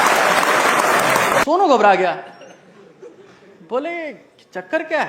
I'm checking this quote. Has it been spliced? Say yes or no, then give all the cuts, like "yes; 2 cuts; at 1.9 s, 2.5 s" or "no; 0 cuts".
yes; 1 cut; at 1.4 s